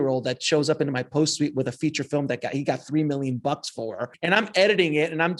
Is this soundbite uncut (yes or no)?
no